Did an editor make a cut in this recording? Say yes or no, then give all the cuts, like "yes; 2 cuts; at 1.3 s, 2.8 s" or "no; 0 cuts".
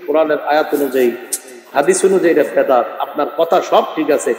no; 0 cuts